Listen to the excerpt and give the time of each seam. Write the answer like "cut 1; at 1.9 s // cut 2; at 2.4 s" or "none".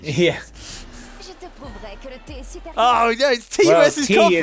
none